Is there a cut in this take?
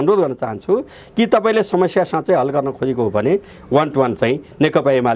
no; 0 cuts

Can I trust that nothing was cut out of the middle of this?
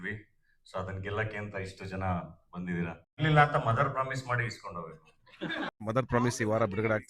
no; 2 cuts; at 3.2 s, 5.8 s

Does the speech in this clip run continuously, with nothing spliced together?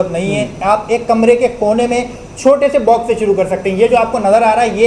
yes; 0 cuts

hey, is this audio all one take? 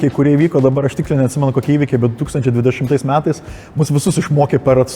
yes; 0 cuts

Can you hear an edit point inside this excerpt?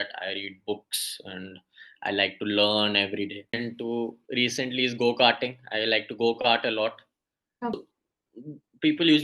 yes; 2 cuts; at 3.5 s, 7.7 s

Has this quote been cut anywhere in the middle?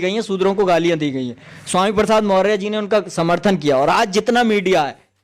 no; 0 cuts

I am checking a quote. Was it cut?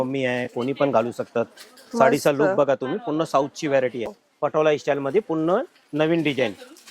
yes; 1 cut; at 4.2 s

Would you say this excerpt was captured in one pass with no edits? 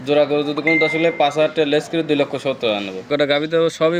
no; 1 cut; at 3.0 s

